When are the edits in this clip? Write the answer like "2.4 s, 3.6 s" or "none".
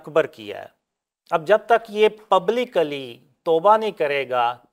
none